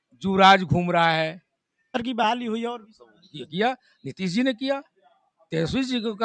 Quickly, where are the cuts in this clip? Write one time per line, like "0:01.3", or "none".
0:01.9